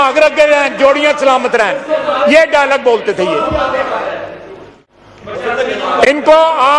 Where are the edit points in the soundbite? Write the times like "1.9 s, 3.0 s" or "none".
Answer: none